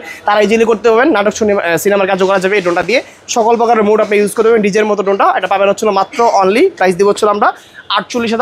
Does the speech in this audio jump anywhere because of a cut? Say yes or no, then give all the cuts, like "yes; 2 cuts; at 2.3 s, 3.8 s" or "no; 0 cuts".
no; 0 cuts